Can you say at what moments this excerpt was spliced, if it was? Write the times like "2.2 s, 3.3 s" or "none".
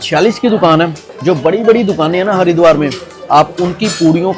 1.1 s